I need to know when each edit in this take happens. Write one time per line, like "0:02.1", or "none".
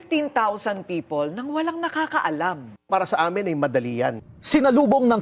0:04.3